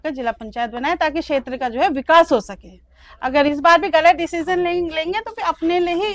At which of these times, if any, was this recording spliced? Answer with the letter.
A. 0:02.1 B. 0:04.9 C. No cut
C